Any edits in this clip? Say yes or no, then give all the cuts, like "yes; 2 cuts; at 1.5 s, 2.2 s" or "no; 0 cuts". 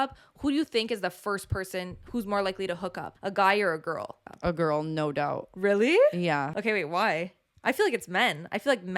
yes; 3 cuts; at 3.1 s, 4.2 s, 6.5 s